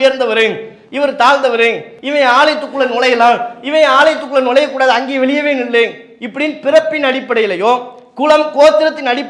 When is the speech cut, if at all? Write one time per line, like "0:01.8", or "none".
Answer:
0:01.9